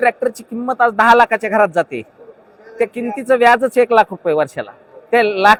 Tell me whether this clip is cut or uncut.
uncut